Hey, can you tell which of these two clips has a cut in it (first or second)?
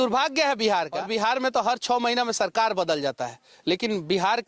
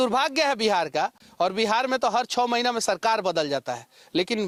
first